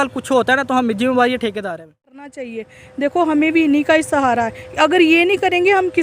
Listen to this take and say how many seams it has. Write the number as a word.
one